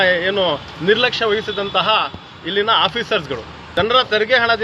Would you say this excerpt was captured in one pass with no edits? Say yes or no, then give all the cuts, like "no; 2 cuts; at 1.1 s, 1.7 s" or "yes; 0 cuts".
no; 1 cut; at 3.7 s